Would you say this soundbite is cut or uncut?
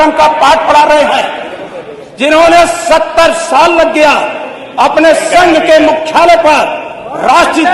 uncut